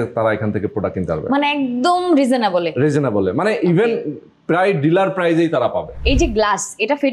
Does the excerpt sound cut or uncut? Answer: cut